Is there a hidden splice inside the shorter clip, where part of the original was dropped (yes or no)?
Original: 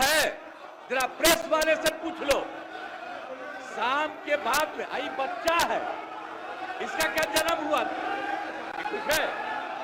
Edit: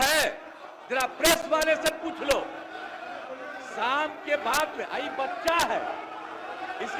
no